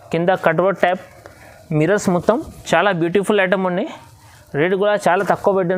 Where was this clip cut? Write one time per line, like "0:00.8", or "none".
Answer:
none